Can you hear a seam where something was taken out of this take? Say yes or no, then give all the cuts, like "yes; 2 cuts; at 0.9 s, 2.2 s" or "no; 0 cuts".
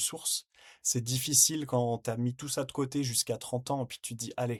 no; 0 cuts